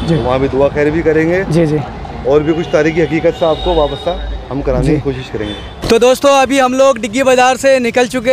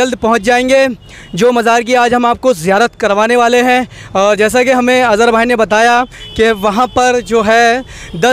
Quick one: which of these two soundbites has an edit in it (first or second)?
first